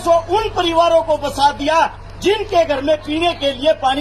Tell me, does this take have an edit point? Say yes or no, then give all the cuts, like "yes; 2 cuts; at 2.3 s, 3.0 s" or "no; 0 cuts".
no; 0 cuts